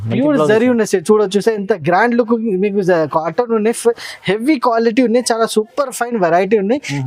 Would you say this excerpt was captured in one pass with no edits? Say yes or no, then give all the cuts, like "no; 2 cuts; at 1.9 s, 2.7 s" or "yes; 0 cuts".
yes; 0 cuts